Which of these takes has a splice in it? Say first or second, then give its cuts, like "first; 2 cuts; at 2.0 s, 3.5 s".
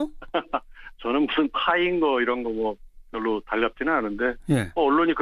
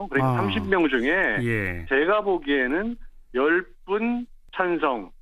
second; 1 cut; at 2.5 s